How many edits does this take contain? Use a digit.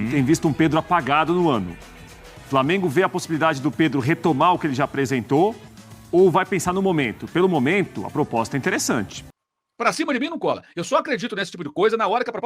1